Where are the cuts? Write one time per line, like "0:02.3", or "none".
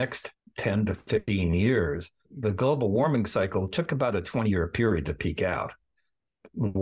none